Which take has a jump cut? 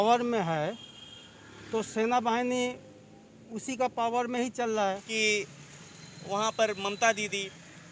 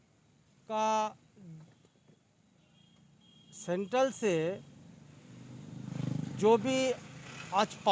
first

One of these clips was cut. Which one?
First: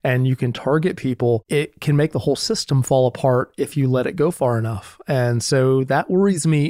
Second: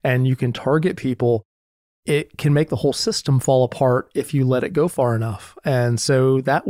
first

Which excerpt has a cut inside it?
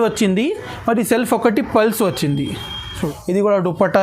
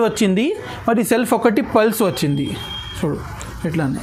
first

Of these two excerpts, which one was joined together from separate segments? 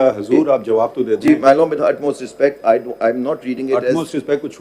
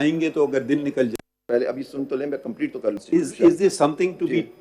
second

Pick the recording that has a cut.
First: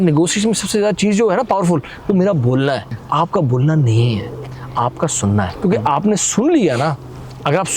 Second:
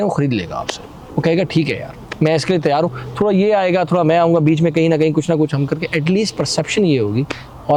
first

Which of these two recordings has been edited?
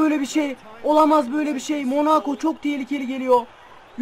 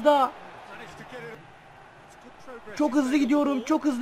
second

